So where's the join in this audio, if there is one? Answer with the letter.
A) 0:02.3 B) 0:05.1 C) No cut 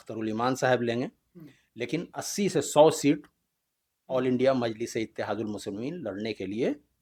C